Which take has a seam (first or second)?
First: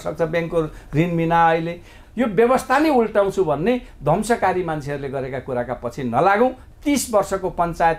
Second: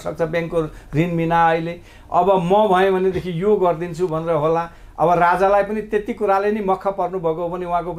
first